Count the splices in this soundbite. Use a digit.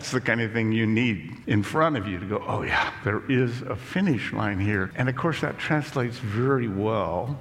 2